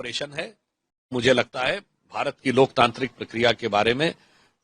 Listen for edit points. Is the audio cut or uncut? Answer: cut